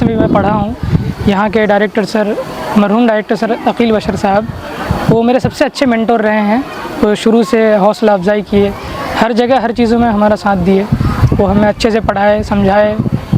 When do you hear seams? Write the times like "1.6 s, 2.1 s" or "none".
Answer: none